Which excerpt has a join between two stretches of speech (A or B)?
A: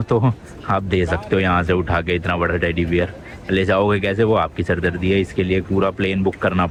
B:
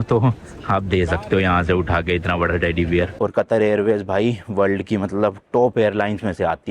B